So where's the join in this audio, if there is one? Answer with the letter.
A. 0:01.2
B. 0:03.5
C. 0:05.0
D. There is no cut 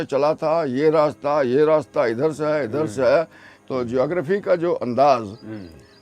B